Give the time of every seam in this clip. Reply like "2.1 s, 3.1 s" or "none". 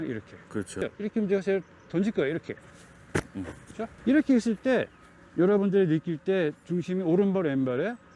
0.8 s, 4.0 s

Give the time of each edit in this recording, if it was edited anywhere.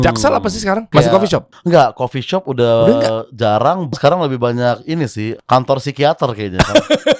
1.2 s, 3.9 s, 5.3 s

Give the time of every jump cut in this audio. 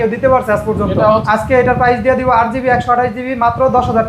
1.2 s

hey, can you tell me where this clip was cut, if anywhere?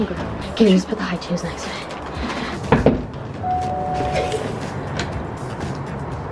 2.6 s, 4.6 s

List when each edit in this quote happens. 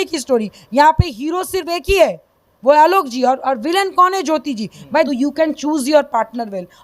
5.1 s

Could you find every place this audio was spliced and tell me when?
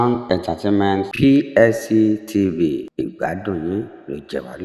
none

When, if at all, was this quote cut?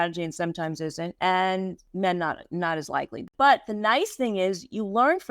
1.1 s, 1.8 s, 3.2 s

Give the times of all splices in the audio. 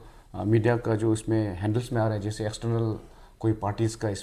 none

